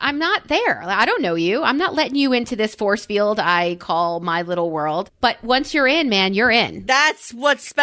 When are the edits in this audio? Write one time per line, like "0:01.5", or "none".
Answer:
0:05.1
0:06.8